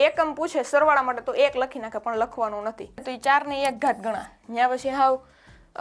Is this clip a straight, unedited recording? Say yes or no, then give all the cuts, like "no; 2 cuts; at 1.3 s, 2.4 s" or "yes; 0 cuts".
no; 1 cut; at 3.1 s